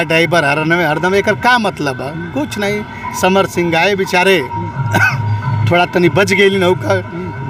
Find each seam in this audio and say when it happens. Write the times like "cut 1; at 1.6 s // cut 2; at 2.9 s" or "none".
none